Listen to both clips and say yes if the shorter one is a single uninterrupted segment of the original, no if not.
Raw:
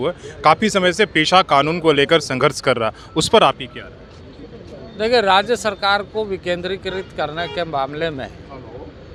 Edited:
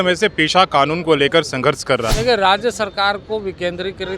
no